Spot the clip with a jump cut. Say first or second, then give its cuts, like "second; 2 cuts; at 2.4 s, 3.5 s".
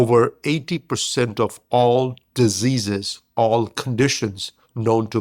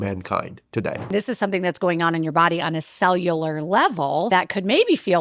second; 2 cuts; at 1.1 s, 4.3 s